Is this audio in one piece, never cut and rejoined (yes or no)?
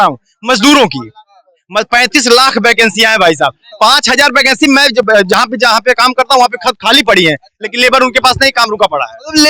yes